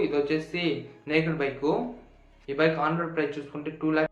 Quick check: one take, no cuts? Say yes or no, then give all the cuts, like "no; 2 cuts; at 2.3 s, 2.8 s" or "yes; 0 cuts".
yes; 0 cuts